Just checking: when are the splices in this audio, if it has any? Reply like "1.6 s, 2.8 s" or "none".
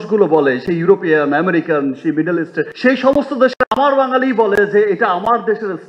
none